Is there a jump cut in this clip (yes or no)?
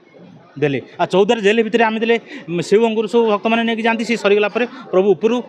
no